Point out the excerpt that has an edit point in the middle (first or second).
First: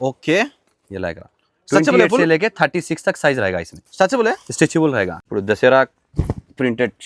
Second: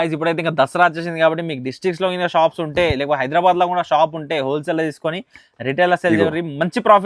first